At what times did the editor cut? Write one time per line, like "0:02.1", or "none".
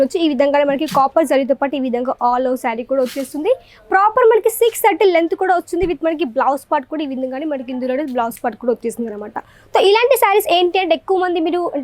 none